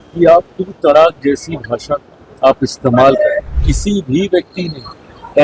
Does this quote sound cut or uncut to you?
cut